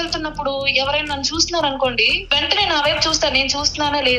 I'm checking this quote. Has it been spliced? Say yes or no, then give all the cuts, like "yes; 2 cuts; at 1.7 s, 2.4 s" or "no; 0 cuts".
yes; 1 cut; at 2.1 s